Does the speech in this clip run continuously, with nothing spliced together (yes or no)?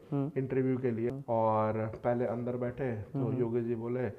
no